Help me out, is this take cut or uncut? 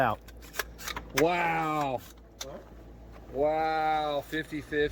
uncut